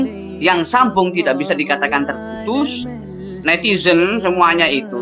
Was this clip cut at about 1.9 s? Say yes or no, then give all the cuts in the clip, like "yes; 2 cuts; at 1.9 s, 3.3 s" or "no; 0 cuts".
no; 1 cut; at 3.1 s